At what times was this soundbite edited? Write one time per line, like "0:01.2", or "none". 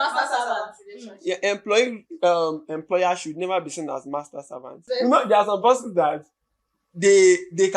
0:04.8